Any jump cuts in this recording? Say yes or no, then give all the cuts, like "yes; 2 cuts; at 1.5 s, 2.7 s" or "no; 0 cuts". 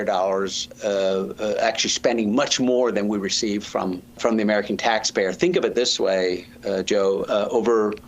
yes; 1 cut; at 4.2 s